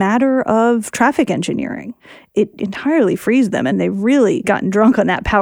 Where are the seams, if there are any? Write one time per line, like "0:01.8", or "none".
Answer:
0:02.4
0:03.7
0:04.5